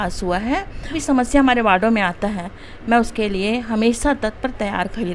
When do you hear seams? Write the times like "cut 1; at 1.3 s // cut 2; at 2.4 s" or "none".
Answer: cut 1; at 1.0 s